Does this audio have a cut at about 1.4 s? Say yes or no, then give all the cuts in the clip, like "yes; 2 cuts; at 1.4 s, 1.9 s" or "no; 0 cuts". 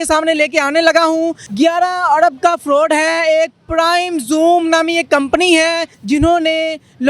yes; 2 cuts; at 1.4 s, 5.9 s